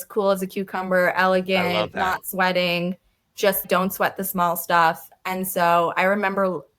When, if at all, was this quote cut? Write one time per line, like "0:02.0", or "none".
0:03.6

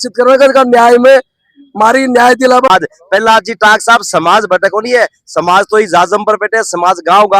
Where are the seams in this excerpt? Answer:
0:02.7

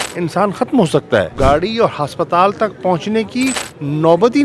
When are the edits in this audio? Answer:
0:01.3

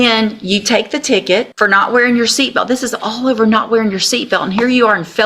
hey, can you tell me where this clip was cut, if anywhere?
0:01.5

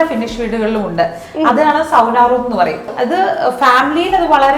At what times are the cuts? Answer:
0:02.9

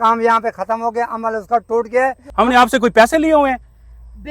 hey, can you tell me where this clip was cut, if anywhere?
0:02.2

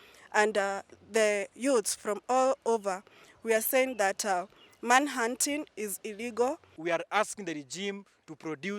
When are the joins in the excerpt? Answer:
0:06.7

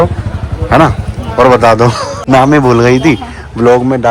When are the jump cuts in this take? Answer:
0:02.1

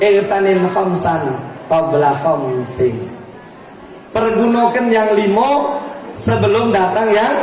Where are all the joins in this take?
none

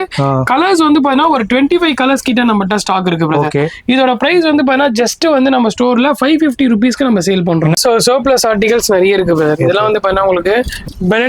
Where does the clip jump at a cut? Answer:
0:07.8

